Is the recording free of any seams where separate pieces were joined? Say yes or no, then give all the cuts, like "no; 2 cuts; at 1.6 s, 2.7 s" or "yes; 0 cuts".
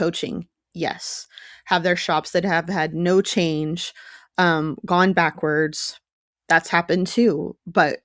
yes; 0 cuts